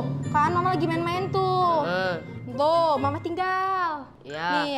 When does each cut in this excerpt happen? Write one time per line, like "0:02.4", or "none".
none